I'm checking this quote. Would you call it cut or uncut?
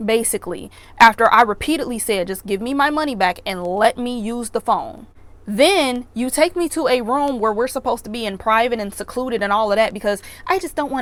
uncut